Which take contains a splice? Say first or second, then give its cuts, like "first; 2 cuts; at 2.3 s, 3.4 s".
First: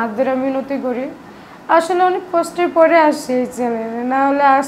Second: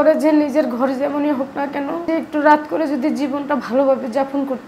second; 1 cut; at 2.0 s